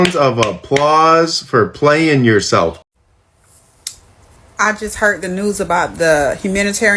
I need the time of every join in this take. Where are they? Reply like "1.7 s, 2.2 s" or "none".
2.8 s